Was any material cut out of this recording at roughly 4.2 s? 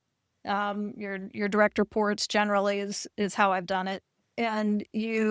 yes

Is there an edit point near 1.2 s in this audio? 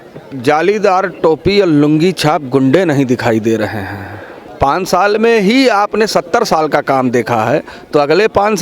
no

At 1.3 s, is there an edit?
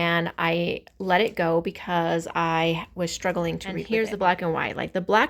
no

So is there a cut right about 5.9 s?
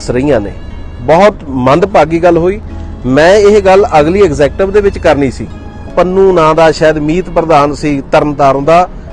yes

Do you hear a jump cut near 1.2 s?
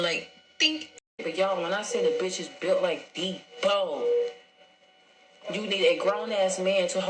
yes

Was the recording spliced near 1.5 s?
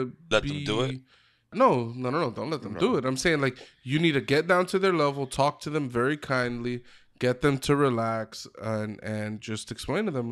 yes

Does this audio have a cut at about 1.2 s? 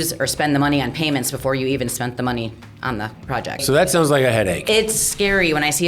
no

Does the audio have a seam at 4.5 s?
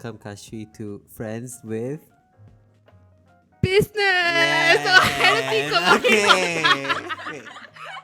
no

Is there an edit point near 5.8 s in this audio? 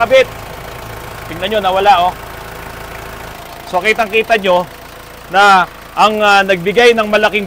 no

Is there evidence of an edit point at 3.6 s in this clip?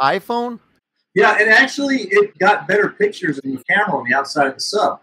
yes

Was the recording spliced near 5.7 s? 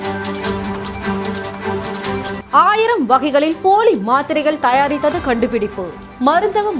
no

